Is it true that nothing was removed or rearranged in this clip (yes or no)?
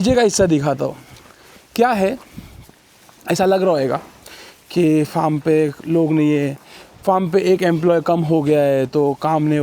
yes